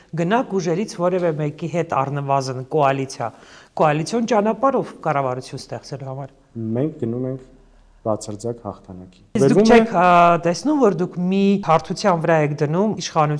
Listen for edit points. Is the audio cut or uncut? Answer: cut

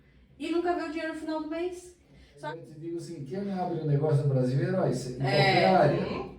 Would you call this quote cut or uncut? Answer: cut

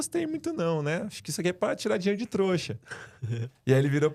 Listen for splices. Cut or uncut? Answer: uncut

